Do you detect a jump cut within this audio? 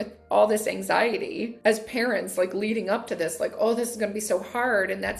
yes; 1 cut; at 1.5 s

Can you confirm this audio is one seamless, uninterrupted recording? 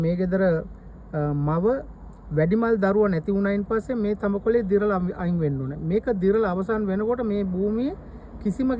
yes; 0 cuts

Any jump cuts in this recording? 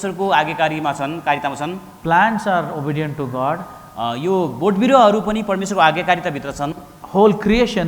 yes; 1 cut; at 6.9 s

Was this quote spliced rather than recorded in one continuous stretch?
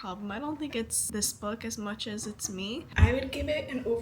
yes; 2 cuts; at 1.0 s, 2.9 s

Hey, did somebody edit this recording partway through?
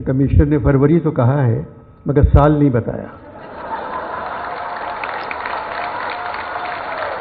no; 0 cuts

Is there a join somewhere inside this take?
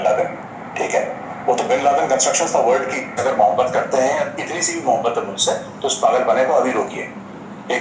yes; 1 cut; at 3.2 s

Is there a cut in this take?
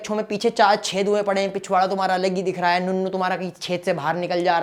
no; 0 cuts

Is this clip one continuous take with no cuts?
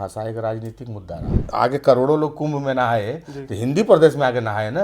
no; 1 cut; at 1.4 s

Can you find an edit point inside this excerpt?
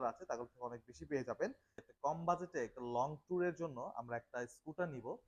yes; 1 cut; at 1.7 s

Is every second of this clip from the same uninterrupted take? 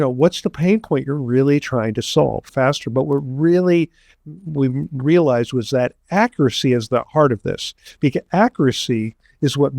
no; 1 cut; at 2.5 s

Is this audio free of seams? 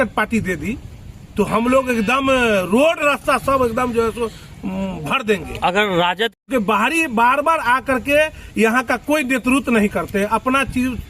no; 1 cut; at 6.4 s

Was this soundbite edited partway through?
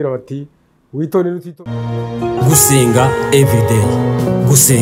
yes; 1 cut; at 1.5 s

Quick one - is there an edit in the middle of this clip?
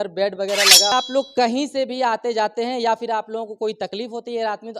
yes; 1 cut; at 0.9 s

